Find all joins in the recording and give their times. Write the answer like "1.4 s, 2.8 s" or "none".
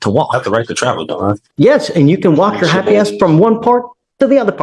1.4 s